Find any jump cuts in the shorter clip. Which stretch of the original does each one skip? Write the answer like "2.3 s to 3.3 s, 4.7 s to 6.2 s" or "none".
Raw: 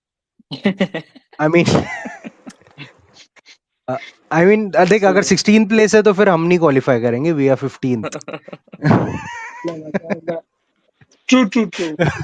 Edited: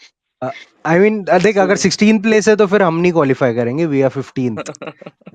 none